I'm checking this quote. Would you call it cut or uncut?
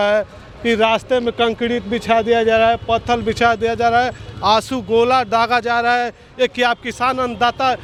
uncut